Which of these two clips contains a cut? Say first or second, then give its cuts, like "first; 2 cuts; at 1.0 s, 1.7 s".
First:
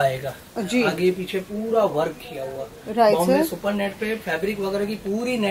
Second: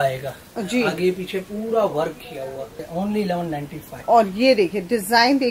second; 1 cut; at 2.7 s